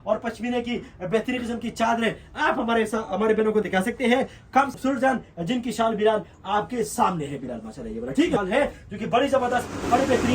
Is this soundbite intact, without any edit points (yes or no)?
no